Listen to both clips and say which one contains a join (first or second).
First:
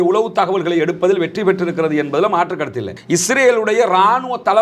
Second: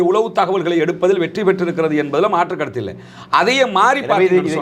first